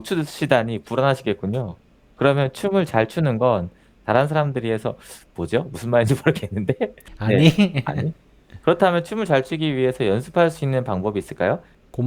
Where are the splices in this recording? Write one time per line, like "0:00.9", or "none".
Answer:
0:07.0